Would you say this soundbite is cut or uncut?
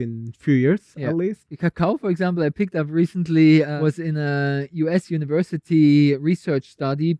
cut